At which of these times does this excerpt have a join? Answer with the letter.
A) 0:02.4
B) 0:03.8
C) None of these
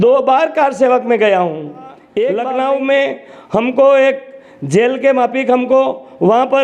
A